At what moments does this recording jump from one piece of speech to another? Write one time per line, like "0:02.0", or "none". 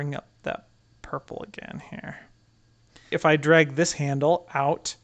0:03.1